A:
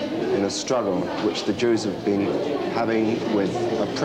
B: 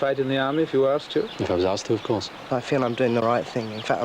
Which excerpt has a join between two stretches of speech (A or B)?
B